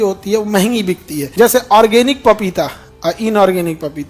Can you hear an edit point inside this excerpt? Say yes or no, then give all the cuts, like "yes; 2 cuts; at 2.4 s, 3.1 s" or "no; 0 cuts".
yes; 1 cut; at 1.2 s